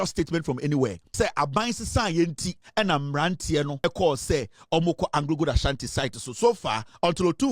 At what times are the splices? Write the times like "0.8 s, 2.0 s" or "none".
1.0 s, 2.5 s, 3.8 s